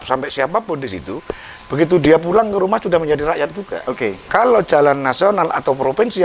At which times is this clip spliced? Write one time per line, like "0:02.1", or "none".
0:04.2